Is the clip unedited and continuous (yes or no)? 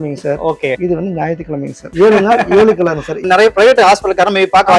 no